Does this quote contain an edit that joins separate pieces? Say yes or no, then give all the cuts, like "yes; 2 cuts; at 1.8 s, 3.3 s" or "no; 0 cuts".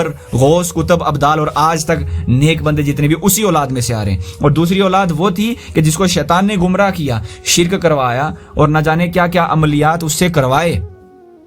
no; 0 cuts